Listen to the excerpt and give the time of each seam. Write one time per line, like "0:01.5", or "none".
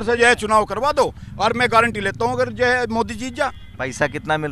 none